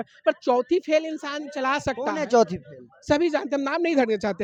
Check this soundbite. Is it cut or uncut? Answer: uncut